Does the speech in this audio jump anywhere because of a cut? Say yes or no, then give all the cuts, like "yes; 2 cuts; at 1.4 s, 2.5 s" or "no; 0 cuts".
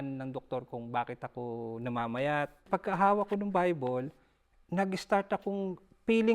yes; 1 cut; at 2.7 s